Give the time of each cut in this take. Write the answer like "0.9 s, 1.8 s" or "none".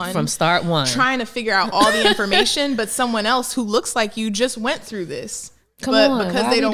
none